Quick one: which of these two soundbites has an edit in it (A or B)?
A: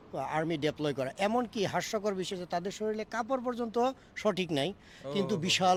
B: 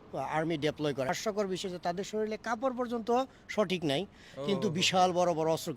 B